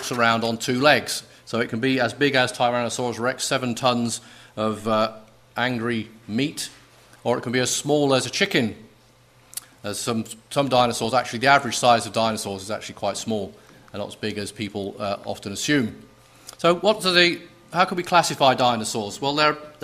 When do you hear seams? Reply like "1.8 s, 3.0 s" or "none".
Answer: 6.0 s